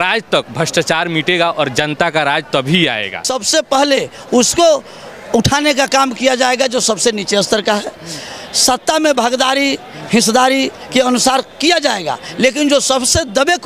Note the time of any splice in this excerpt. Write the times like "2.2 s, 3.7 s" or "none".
3.3 s